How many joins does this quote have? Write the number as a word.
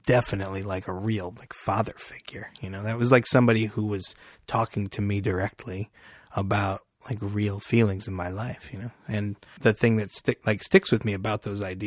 one